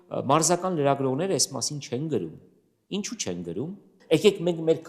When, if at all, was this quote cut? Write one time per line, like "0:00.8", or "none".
0:03.9

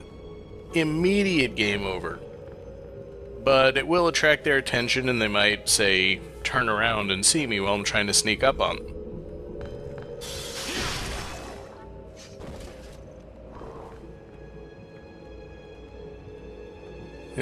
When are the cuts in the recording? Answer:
0:05.0

